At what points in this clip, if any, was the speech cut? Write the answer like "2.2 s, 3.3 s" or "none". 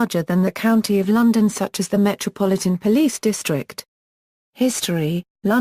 4.5 s